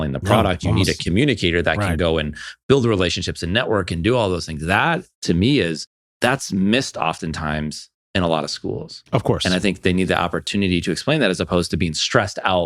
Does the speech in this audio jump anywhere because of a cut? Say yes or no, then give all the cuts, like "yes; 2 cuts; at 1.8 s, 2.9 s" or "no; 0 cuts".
no; 0 cuts